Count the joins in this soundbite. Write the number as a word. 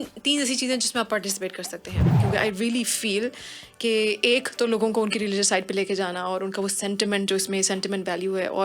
one